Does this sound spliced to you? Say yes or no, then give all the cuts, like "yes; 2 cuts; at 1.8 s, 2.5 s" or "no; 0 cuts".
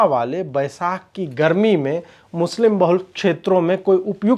no; 0 cuts